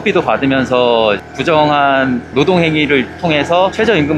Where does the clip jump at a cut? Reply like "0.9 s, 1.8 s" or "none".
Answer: none